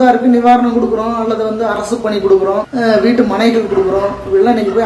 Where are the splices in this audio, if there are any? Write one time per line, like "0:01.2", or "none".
0:02.7